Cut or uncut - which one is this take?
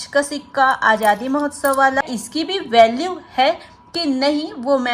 cut